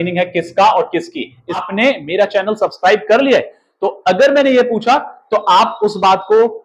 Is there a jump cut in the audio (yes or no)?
yes